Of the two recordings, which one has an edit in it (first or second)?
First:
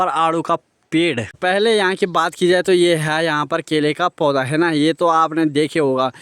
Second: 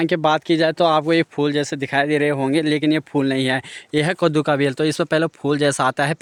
first